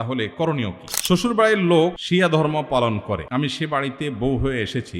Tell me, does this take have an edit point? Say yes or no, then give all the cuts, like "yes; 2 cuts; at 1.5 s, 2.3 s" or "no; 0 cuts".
yes; 3 cuts; at 0.9 s, 2.0 s, 3.2 s